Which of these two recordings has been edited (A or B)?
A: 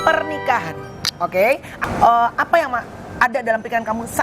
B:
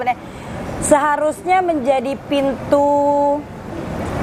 A